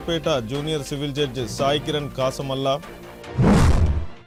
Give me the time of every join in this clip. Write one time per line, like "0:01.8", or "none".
none